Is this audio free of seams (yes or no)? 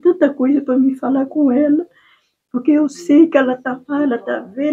yes